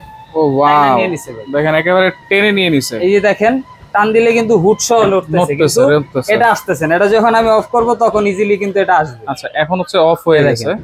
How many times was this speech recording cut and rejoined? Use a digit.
0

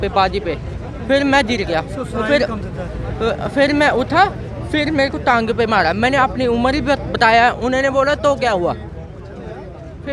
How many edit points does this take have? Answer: 0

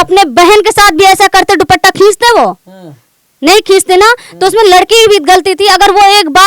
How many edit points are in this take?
0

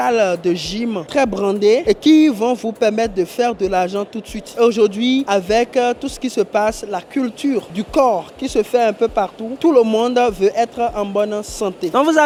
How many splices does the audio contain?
0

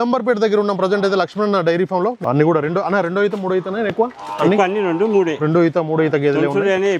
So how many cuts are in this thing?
1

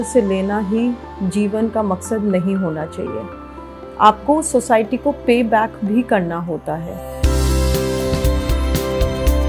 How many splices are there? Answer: 1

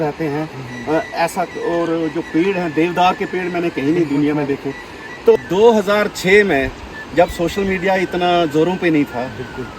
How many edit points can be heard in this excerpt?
1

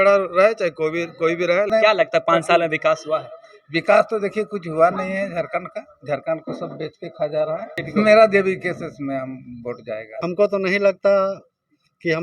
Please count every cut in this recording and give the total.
3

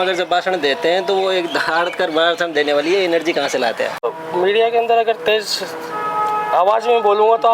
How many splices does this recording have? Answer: 1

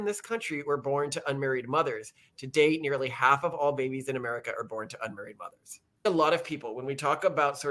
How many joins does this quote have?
1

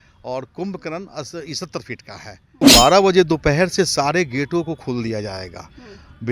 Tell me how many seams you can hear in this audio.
1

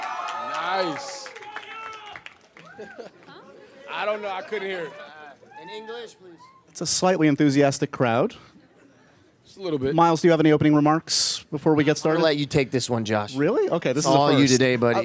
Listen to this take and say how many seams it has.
1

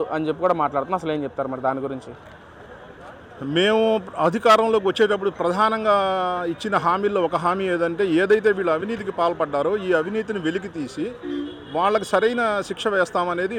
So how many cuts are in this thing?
0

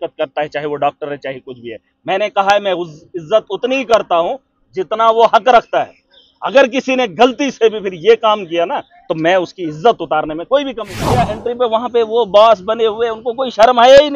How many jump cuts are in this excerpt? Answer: 1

